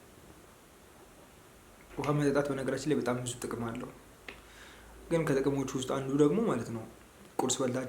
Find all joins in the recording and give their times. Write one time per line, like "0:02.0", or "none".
0:01.9